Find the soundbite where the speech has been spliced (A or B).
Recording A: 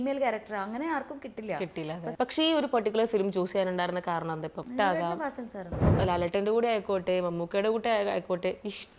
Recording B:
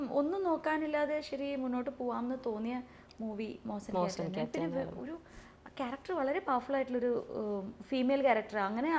A